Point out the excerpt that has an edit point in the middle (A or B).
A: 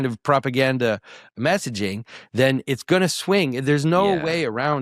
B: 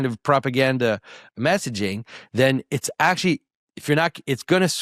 A